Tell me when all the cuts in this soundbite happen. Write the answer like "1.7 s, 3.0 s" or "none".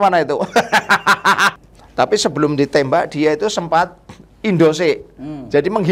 1.5 s